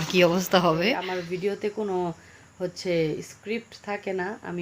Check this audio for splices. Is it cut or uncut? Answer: cut